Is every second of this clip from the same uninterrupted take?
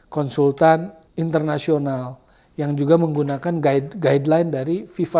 no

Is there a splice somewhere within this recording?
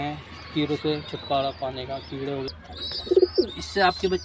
yes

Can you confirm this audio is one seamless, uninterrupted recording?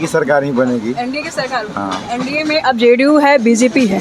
yes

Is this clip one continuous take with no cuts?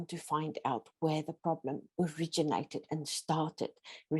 no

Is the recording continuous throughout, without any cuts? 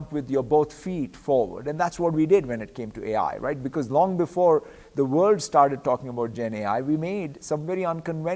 yes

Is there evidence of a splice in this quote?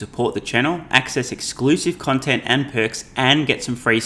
no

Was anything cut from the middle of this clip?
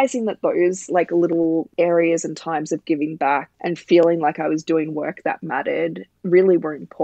yes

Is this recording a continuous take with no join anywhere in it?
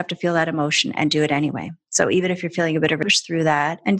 no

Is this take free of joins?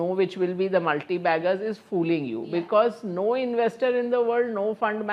yes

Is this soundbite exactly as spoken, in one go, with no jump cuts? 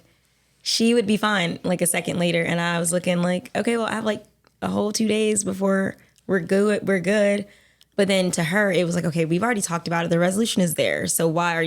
no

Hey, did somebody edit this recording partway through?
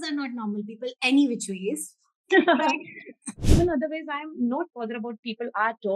yes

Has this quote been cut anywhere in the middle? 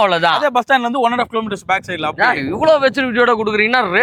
no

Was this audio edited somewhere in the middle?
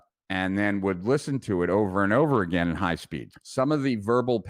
yes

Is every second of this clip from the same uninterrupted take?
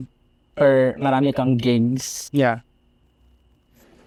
yes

